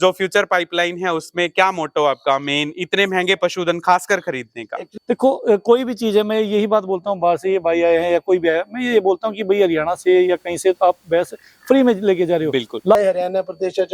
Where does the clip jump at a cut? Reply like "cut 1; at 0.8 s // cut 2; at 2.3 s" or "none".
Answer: cut 1; at 4.9 s // cut 2; at 12.9 s